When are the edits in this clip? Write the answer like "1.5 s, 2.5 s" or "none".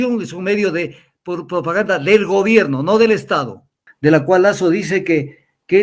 3.8 s